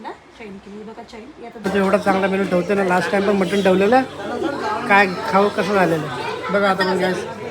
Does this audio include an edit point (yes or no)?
yes